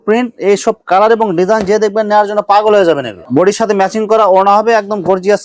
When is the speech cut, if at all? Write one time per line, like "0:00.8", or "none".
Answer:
none